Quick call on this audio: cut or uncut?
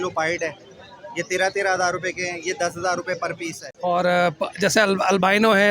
cut